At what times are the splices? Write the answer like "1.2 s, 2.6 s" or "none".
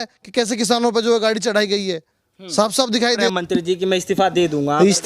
3.3 s